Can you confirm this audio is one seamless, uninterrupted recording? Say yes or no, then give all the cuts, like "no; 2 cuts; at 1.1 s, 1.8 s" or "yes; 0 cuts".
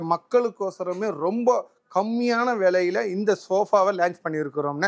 yes; 0 cuts